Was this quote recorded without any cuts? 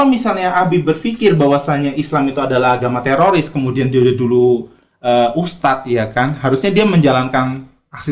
yes; 0 cuts

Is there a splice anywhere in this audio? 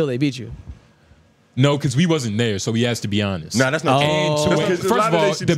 yes; 1 cut; at 4.6 s

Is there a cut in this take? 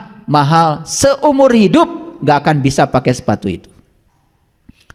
no; 0 cuts

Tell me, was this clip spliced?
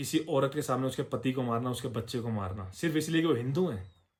no; 0 cuts

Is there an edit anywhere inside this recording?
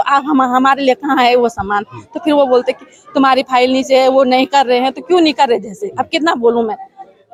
no; 0 cuts

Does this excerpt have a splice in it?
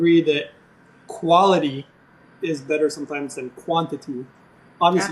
no; 0 cuts

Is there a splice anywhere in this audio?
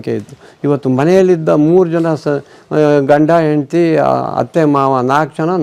no; 0 cuts

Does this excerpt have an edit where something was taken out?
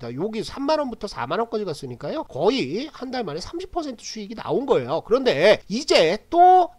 yes; 2 cuts; at 2.3 s, 5.7 s

